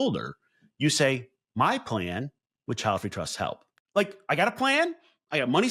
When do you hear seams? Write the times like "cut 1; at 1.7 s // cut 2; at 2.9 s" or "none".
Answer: cut 1; at 3.7 s